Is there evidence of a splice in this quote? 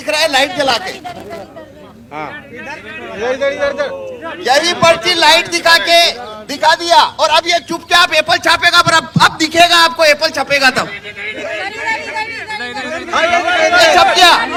no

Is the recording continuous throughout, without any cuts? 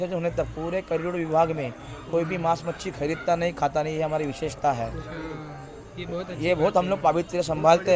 yes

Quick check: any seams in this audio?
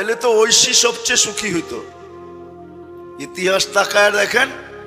yes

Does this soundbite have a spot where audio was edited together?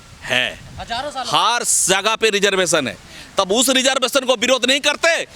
no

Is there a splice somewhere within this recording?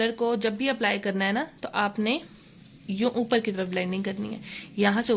no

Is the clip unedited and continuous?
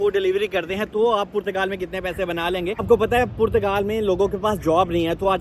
no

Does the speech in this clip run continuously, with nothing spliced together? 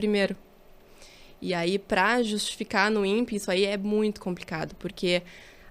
yes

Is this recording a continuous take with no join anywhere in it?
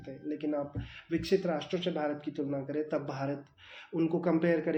yes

